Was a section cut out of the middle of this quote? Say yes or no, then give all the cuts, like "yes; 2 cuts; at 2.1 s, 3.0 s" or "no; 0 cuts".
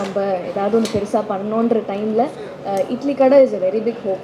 no; 0 cuts